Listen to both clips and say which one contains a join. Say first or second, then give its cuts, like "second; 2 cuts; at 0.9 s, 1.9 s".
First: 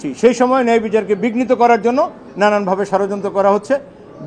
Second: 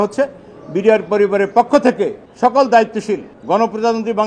second; 2 cuts; at 2.2 s, 3.3 s